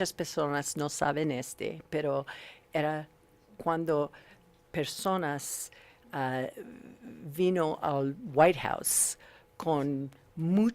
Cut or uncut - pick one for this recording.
uncut